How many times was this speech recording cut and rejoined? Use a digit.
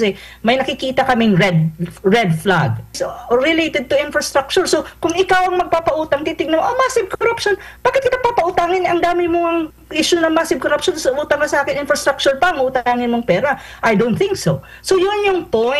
1